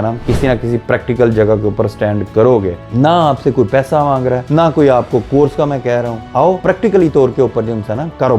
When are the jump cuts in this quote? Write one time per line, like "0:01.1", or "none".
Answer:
0:02.8
0:04.4
0:06.4

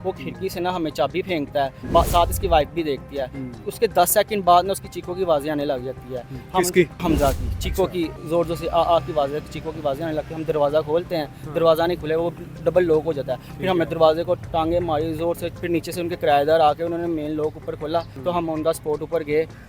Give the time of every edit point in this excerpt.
0:01.8
0:07.0
0:15.5
0:18.1

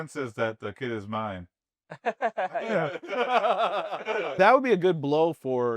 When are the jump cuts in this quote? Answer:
0:04.3

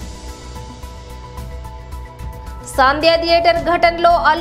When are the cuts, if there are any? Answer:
none

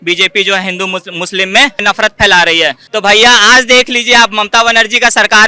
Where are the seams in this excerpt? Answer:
0:01.8
0:02.8

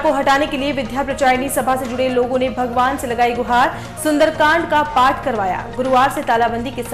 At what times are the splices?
none

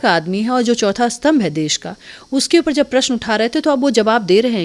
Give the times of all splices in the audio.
none

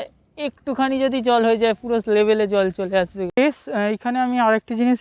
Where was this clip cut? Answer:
0:03.3

